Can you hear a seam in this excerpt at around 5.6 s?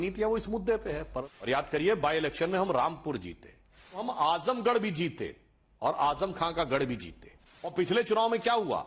no; 3 cuts; at 1.2 s, 4.1 s, 7.7 s

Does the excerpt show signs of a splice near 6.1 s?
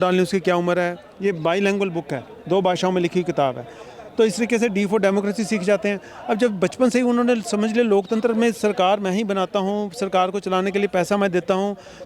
no; 1 cut; at 1.1 s

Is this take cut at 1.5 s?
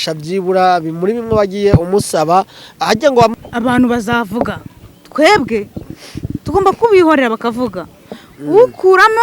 no; 1 cut; at 3.4 s

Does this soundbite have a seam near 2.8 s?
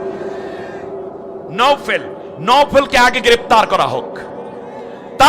no; 1 cut; at 1.5 s

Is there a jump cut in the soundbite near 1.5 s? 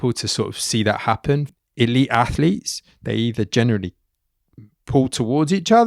yes; 1 cut; at 1.5 s

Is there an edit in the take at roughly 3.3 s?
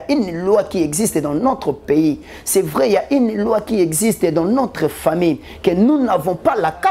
no; 0 cuts

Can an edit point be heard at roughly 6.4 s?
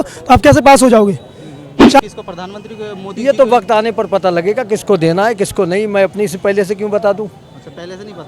no; 1 cut; at 2.0 s

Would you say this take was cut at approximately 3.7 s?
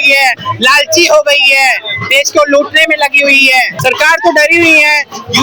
yes; 1 cut; at 3.7 s

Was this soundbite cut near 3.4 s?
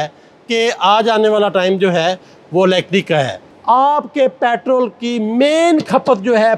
yes; 1 cut; at 3.4 s

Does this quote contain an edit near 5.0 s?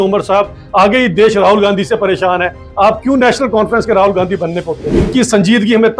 yes; 1 cut; at 5.0 s

